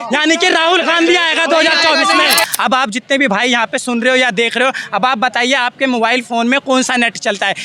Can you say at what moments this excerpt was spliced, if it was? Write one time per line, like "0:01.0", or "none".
0:02.4